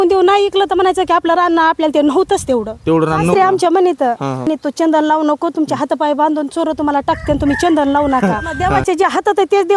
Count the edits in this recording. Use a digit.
3